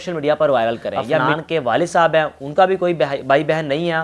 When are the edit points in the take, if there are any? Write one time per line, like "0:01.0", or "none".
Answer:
0:01.2

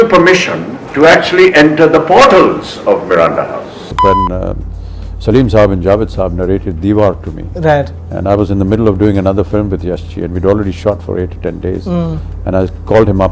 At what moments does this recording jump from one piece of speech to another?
0:03.9

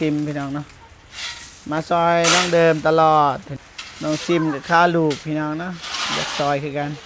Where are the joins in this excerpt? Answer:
0:03.5

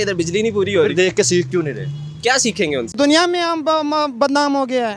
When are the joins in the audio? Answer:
0:02.9

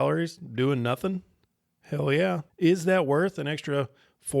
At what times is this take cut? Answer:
0:02.5

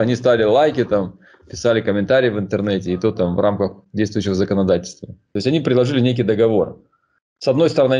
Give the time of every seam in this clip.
0:05.3

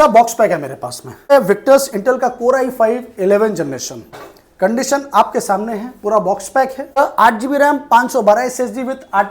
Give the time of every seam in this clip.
0:01.3
0:07.0

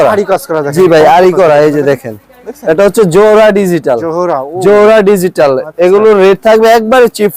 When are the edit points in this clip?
none

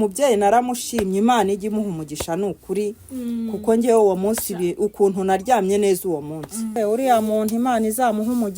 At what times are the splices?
0:06.7

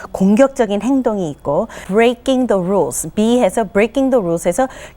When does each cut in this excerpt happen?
0:01.8

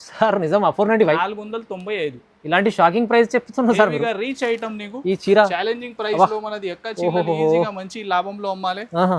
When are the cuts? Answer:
none

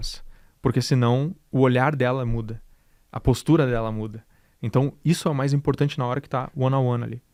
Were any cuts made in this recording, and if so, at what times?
none

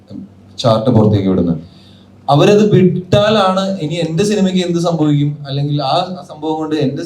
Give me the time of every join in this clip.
none

